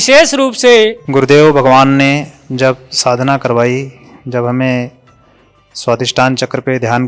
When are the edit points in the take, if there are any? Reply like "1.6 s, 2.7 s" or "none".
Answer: 1.0 s